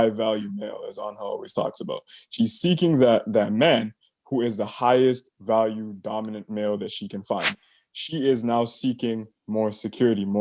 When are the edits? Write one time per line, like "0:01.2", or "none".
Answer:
0:07.5